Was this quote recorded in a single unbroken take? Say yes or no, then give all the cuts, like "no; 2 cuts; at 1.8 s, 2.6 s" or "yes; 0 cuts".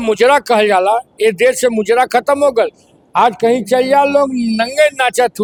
yes; 0 cuts